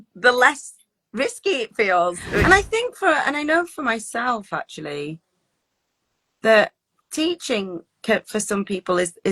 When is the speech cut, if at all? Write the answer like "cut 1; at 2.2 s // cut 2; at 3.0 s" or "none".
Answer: cut 1; at 2.4 s